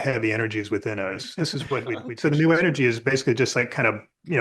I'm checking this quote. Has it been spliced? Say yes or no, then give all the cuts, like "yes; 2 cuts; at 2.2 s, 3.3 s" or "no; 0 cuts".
yes; 1 cut; at 2.0 s